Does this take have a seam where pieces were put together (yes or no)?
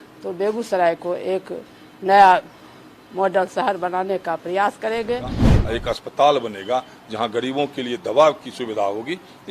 yes